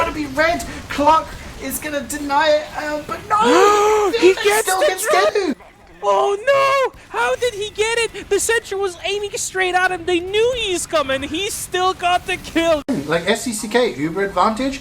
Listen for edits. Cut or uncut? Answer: cut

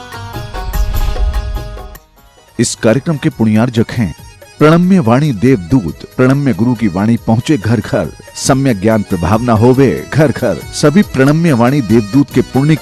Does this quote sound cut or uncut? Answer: uncut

